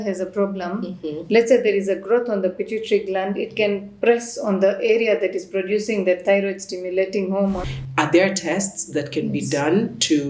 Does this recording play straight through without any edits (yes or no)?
no